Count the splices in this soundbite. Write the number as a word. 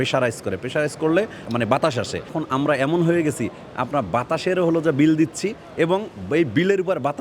zero